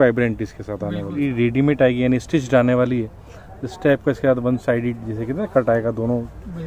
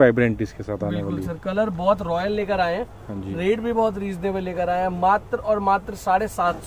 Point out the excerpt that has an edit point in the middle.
first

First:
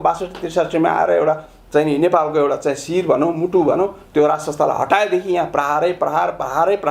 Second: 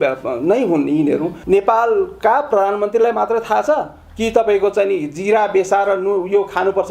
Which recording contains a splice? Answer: second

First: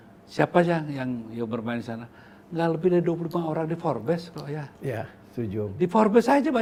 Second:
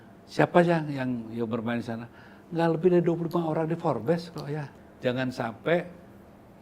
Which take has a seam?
second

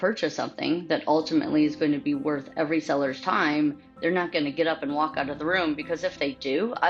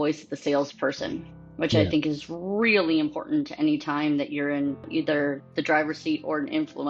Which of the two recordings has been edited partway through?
second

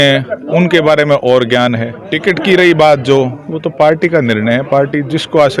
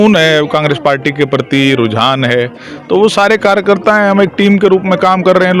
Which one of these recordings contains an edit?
first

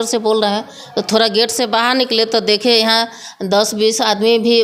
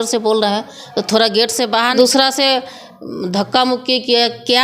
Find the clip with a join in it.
second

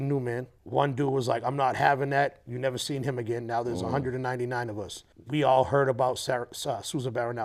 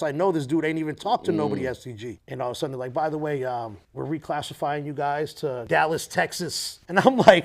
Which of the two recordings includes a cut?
second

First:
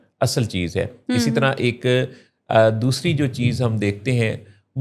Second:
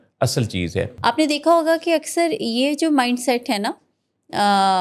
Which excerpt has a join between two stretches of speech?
second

